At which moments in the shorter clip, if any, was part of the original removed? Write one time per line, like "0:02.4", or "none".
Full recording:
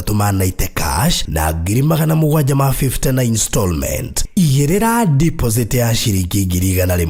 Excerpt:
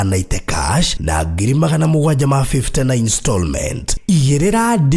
none

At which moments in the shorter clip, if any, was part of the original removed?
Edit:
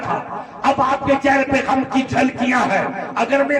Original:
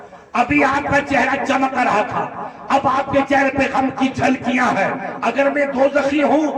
none

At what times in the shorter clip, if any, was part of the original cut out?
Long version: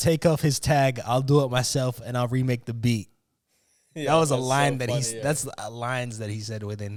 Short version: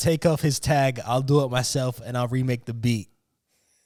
none

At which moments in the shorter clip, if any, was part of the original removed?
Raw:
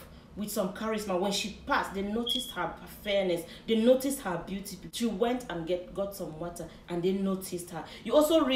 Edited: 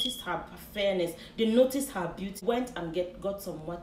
0:02.4

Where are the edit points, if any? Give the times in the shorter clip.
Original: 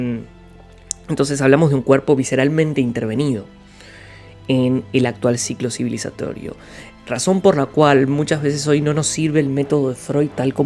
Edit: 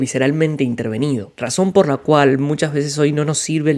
0:01.4

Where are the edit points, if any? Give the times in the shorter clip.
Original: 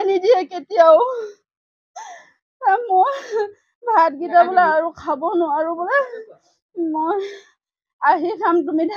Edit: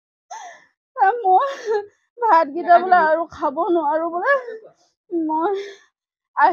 none

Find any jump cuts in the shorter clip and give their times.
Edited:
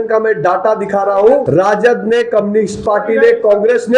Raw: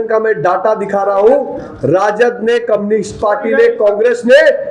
0:01.4

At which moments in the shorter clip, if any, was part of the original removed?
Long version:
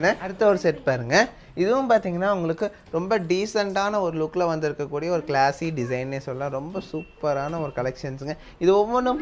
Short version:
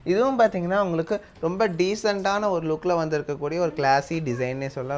none

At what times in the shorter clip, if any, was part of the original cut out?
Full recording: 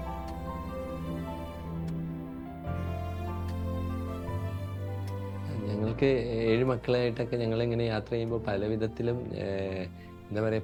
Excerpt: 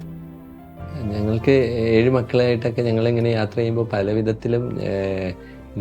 0:01.0

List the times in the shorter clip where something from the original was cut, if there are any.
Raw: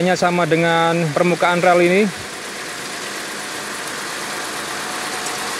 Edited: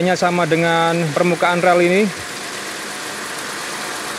0:02.1

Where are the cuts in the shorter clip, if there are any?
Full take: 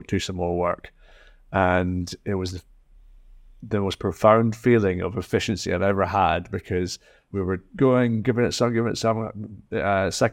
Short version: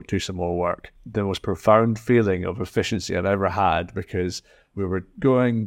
0:00.9

